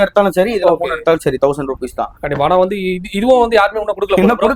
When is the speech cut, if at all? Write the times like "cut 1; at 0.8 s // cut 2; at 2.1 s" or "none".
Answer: none